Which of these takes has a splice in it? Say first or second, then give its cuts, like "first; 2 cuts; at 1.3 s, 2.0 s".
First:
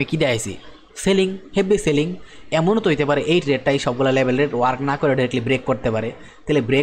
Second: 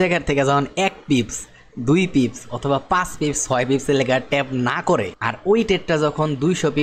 second; 1 cut; at 5.2 s